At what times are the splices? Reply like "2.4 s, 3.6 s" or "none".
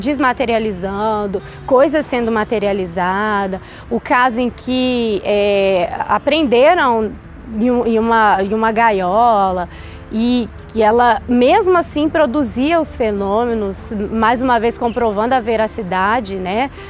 none